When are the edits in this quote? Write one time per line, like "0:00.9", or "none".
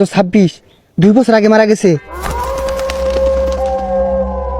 0:02.0